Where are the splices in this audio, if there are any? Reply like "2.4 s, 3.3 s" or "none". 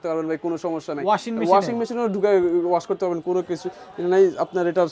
none